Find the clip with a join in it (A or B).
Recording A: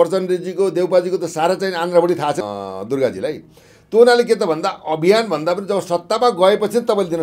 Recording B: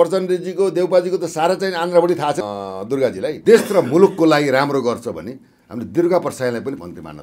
B